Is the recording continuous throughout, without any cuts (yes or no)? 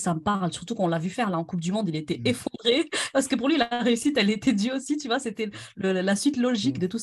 yes